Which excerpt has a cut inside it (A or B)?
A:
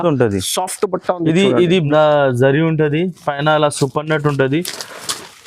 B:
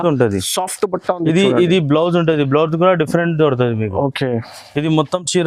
A